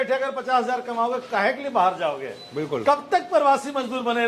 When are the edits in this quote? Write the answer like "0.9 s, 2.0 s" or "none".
none